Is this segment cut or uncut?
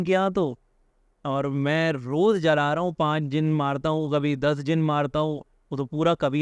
uncut